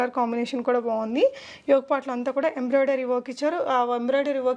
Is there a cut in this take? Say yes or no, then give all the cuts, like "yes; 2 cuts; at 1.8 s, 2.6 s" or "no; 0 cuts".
no; 0 cuts